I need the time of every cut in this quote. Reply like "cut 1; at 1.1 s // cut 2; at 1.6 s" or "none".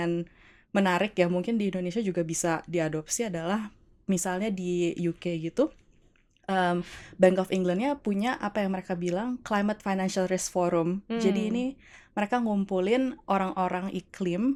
none